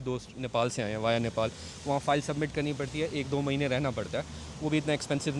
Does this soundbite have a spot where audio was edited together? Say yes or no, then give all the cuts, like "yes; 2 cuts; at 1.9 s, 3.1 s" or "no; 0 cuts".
no; 0 cuts